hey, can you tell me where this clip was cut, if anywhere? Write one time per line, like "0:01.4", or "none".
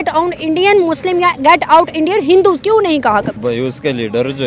0:03.3

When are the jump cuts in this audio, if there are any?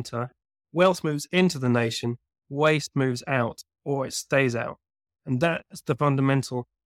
none

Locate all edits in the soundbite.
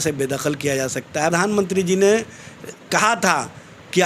0:01.3

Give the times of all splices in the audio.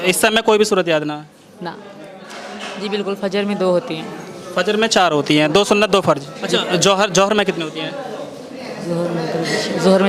0:01.9
0:06.3

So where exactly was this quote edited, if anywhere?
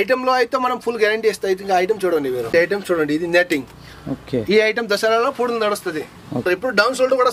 0:02.5
0:06.4

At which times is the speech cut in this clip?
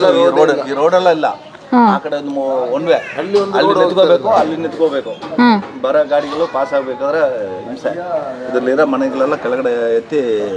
none

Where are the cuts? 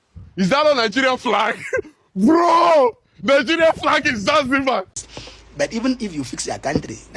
0:04.9

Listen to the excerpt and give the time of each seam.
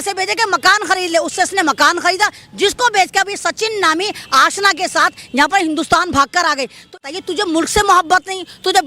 0:07.0

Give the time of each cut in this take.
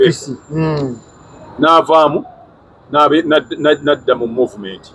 none

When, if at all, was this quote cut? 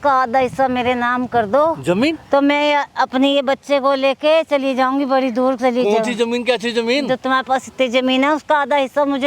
none

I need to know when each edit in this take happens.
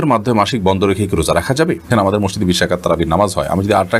0:02.0

